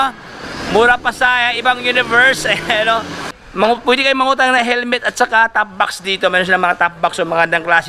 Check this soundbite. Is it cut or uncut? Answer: cut